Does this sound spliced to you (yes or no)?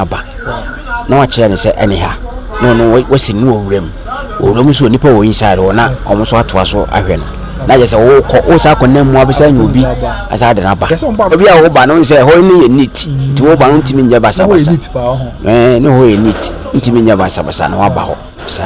yes